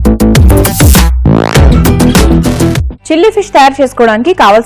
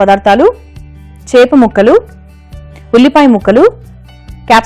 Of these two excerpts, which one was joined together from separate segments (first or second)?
first